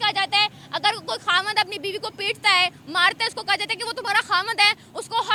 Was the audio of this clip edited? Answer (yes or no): no